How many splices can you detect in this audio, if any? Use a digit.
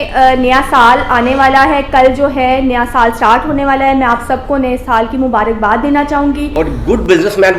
1